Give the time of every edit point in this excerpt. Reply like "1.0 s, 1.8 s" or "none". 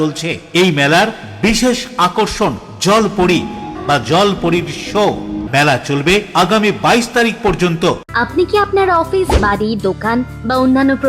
3.7 s, 5.4 s, 8.0 s